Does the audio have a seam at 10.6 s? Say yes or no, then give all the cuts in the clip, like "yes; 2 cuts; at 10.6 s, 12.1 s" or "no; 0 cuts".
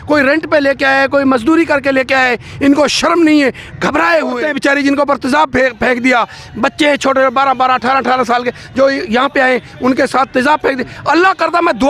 no; 1 cut; at 4.4 s